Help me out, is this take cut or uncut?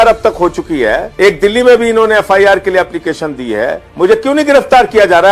cut